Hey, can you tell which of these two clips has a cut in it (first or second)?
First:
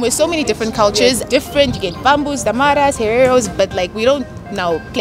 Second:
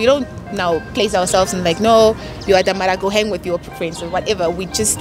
first